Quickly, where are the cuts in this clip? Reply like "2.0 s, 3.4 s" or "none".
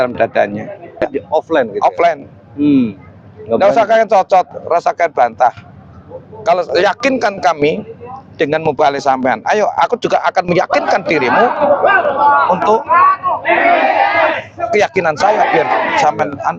1.0 s